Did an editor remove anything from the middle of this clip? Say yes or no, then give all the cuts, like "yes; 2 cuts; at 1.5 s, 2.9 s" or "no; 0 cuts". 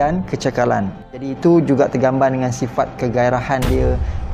yes; 1 cut; at 1.3 s